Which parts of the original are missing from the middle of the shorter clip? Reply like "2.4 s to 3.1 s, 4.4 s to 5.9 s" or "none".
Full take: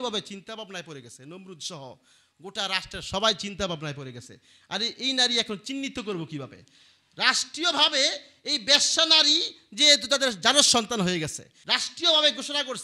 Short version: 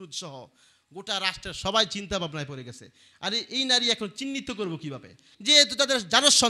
6.8 s to 9.6 s